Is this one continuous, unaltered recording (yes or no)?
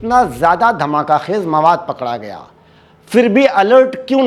yes